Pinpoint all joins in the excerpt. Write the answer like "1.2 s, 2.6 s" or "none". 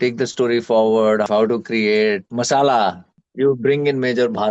1.2 s, 2.2 s, 3.2 s